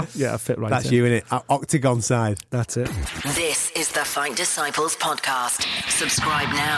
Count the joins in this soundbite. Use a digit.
1